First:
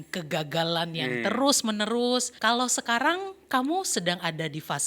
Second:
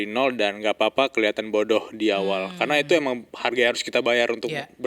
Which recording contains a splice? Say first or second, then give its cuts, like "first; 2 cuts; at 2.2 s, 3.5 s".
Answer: first; 1 cut; at 2.3 s